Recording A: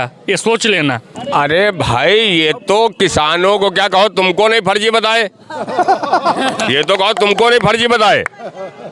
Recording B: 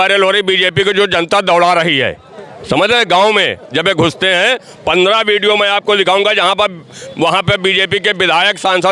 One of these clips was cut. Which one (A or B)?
A